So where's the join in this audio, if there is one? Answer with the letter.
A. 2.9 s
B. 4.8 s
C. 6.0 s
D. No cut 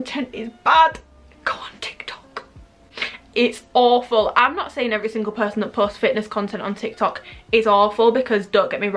D